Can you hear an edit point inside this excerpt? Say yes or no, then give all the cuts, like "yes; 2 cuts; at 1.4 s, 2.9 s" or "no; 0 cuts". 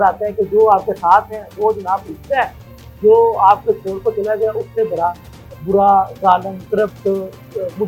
no; 0 cuts